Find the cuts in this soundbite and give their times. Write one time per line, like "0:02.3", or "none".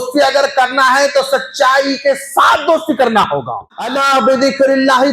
0:04.0